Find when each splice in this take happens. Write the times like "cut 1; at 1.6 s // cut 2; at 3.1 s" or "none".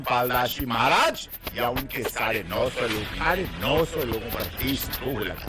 cut 1; at 3.2 s